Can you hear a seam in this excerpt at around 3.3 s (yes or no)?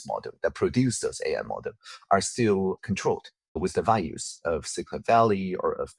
no